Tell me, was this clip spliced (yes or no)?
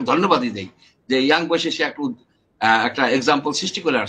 no